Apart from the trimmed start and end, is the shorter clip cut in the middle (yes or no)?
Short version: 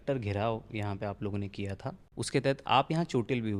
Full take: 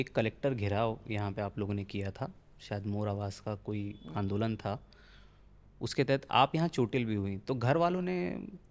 yes